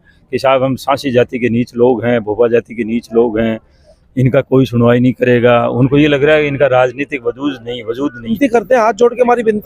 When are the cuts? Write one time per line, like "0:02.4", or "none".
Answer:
0:08.3